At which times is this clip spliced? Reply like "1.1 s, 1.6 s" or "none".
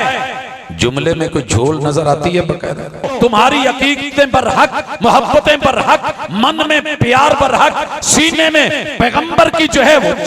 3.1 s